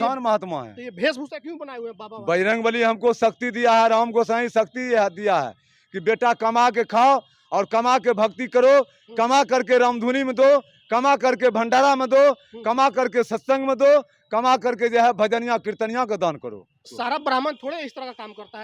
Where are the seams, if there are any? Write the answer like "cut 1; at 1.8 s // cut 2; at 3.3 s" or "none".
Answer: cut 1; at 16.9 s